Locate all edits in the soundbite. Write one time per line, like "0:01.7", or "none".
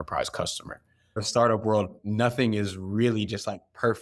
0:01.2